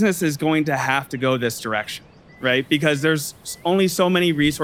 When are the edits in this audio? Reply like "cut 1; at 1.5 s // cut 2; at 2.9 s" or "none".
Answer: none